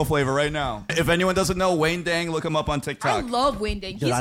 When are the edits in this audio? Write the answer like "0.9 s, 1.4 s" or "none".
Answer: 0.9 s